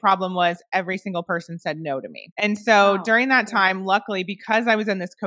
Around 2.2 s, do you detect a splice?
yes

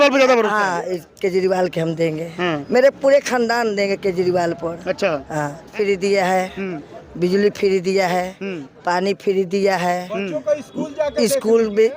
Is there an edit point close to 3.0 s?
no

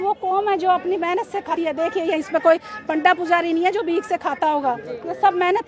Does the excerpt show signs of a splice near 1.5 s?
yes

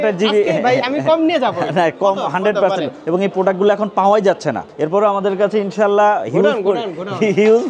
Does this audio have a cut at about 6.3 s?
no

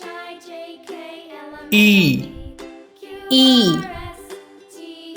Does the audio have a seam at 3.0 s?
no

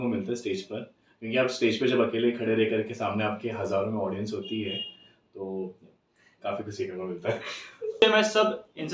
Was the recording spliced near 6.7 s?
no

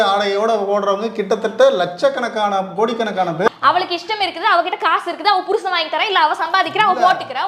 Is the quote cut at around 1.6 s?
no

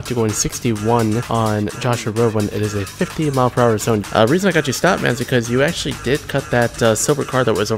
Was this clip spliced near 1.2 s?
yes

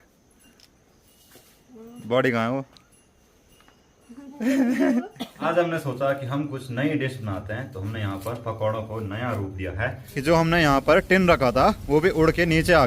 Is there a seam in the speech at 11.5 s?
no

